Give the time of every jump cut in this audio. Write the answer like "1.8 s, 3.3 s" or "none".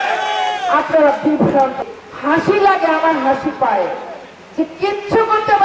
1.8 s